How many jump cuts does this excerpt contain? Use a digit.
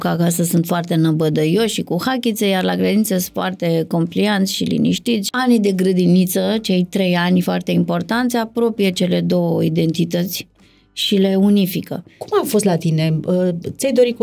2